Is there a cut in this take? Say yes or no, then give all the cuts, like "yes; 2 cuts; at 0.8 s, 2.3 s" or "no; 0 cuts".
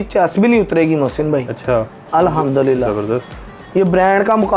no; 0 cuts